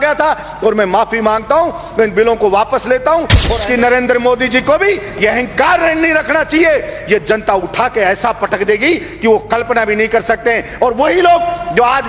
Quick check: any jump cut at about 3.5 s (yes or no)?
yes